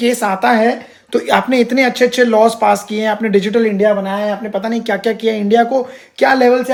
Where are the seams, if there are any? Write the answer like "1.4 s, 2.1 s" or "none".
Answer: none